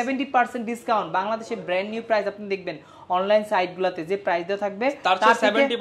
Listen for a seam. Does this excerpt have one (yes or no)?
no